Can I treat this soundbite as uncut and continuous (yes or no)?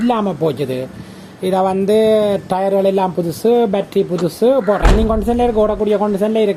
yes